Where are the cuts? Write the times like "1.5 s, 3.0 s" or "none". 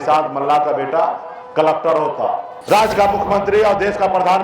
2.5 s